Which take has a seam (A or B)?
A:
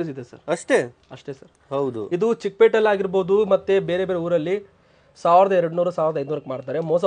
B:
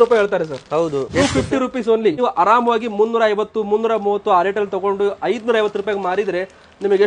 B